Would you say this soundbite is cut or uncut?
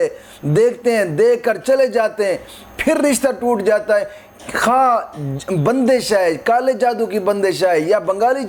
uncut